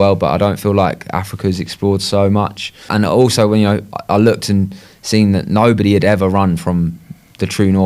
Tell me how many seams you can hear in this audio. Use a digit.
1